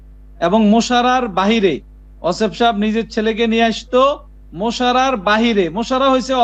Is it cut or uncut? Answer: uncut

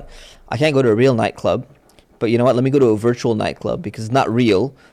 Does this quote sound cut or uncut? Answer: uncut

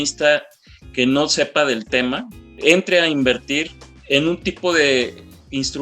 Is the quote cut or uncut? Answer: cut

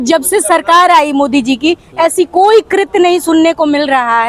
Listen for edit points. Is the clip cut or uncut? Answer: uncut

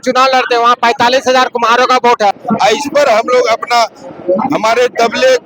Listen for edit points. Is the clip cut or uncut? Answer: cut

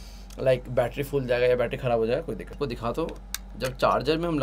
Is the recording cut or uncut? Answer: cut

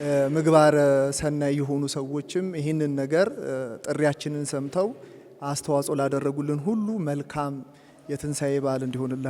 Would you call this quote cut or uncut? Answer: uncut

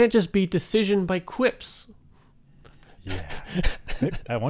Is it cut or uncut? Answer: uncut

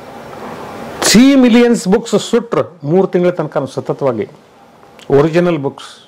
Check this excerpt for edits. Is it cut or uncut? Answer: uncut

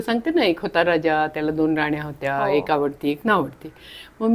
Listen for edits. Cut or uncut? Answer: uncut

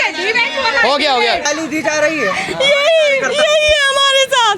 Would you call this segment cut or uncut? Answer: cut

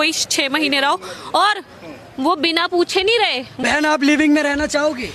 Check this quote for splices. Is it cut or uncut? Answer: cut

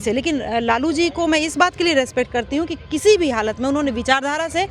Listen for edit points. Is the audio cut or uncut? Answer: uncut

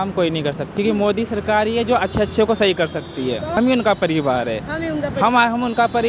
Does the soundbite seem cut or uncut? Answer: cut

